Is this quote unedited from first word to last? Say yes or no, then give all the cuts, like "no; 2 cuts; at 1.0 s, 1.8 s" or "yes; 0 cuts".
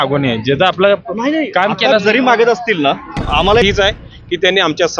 no; 1 cut; at 3.6 s